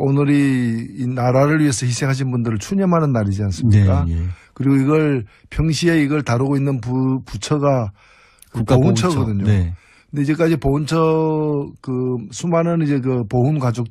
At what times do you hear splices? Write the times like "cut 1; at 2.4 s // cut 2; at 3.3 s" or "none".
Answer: cut 1; at 1.5 s